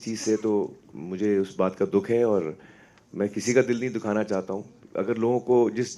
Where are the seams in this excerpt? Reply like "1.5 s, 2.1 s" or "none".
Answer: 4.8 s